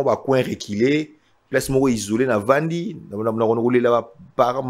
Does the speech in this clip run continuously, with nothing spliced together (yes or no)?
yes